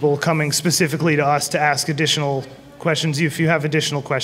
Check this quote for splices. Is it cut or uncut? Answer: uncut